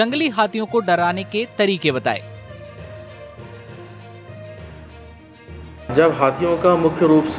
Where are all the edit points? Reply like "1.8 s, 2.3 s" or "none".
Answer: 2.4 s, 4.2 s, 5.4 s

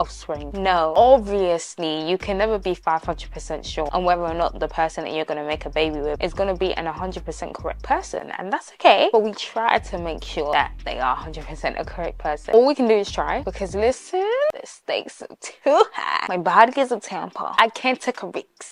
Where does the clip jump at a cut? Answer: none

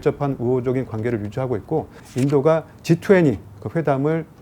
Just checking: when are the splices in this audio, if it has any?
2.0 s

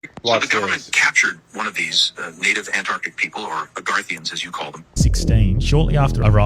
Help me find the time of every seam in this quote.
4.9 s

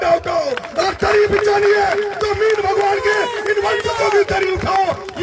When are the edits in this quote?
none

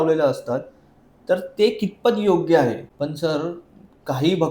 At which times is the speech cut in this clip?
2.9 s

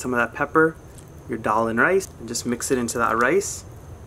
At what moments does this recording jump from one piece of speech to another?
2.2 s

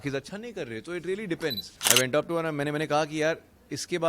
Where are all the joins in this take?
1.9 s

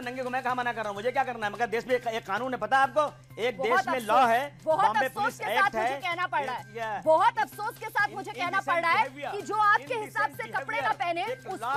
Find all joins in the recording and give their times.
none

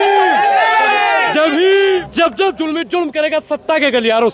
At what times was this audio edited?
2.0 s

